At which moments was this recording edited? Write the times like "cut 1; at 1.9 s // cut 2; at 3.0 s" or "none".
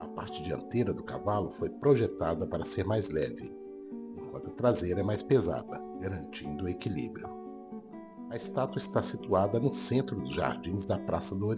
none